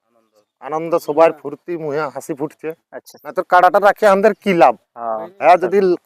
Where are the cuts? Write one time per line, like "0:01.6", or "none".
none